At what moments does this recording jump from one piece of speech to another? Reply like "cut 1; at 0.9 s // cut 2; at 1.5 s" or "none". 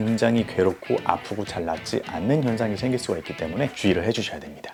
none